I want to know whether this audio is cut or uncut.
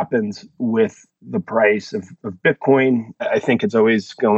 uncut